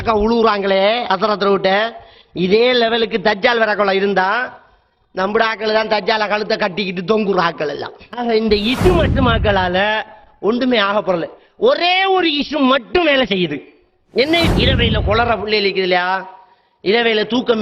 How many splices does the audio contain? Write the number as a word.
two